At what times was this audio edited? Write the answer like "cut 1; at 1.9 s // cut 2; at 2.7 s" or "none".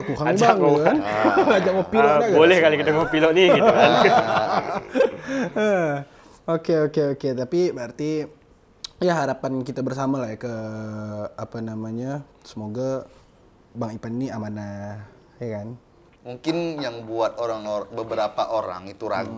none